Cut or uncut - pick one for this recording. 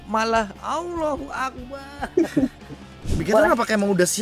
cut